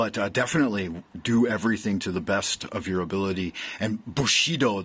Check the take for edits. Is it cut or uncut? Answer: uncut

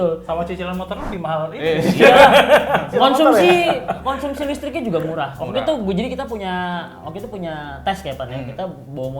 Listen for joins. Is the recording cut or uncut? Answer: uncut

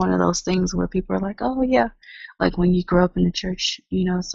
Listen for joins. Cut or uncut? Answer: uncut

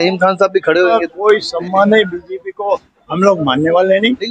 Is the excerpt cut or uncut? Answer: cut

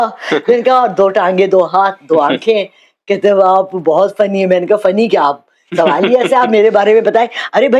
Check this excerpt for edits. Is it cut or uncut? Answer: uncut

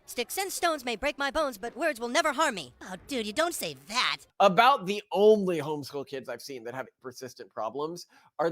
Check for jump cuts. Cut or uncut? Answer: cut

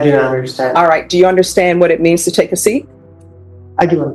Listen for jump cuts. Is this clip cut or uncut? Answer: uncut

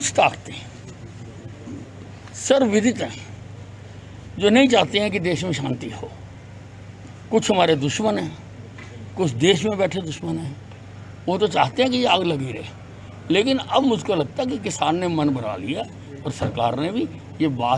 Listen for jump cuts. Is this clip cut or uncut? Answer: uncut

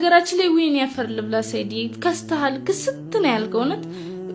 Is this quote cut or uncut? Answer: uncut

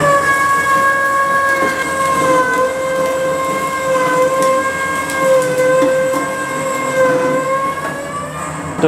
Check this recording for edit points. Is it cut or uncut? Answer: uncut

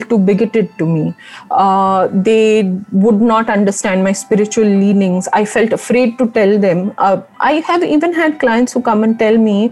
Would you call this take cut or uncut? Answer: uncut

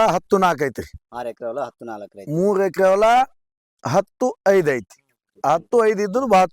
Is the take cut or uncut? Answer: uncut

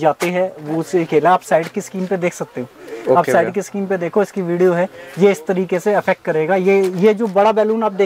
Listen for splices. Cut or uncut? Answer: uncut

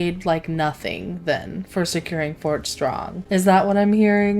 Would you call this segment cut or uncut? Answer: cut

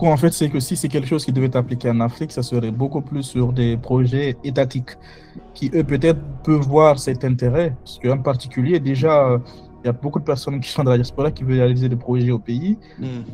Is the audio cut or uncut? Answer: uncut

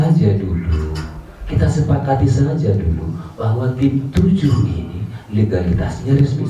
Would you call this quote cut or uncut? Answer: uncut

